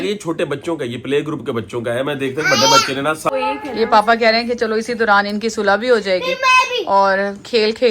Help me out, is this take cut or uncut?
cut